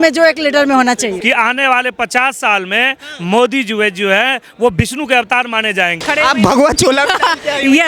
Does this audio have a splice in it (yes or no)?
yes